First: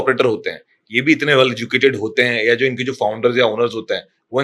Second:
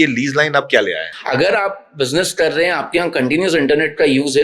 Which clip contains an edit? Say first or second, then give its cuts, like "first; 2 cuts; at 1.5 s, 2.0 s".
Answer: second; 1 cut; at 1.1 s